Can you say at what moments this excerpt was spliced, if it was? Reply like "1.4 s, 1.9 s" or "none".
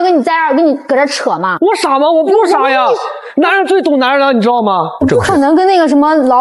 1.5 s, 5.0 s